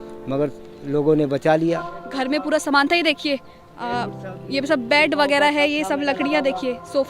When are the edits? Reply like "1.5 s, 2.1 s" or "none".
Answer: 2.0 s